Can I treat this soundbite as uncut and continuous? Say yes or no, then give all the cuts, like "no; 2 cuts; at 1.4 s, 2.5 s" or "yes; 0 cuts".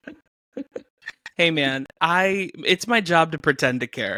yes; 0 cuts